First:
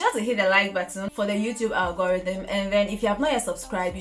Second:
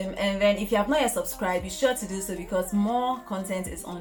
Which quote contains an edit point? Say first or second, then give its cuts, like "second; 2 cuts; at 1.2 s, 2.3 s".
first; 1 cut; at 1.0 s